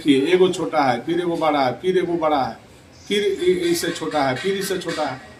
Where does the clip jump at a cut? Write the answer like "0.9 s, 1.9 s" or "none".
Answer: none